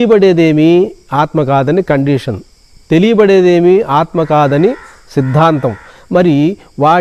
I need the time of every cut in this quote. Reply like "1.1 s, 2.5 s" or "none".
none